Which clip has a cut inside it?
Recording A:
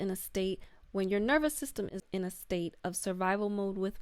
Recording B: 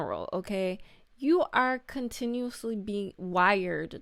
A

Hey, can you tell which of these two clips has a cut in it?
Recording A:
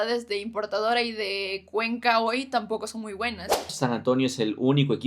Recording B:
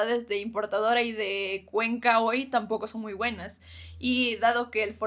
A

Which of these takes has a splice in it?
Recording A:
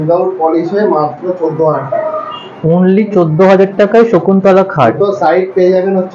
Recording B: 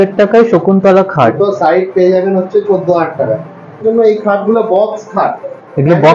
B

